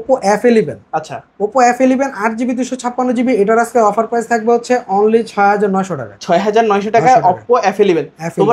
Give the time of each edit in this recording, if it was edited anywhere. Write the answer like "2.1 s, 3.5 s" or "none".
none